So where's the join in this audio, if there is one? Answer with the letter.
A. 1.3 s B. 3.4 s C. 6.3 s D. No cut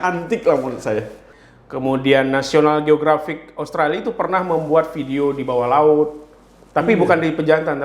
A